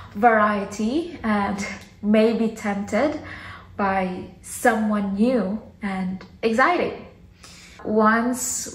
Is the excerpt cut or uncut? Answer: cut